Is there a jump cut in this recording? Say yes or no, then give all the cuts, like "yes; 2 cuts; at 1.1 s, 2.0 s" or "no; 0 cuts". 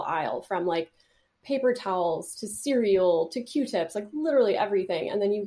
no; 0 cuts